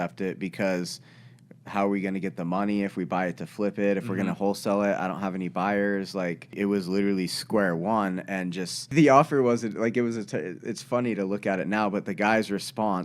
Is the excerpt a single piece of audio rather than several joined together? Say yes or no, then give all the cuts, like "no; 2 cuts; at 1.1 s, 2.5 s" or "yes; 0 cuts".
no; 2 cuts; at 6.6 s, 8.9 s